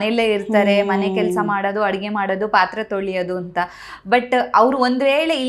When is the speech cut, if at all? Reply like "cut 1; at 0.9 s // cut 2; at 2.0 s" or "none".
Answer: none